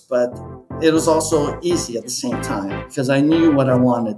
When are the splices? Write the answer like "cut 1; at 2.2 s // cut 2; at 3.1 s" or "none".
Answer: cut 1; at 2.8 s